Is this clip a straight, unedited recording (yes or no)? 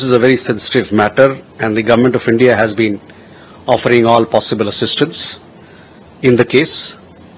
yes